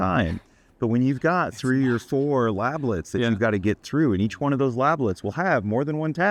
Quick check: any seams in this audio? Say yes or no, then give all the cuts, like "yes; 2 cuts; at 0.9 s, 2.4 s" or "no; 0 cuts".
no; 0 cuts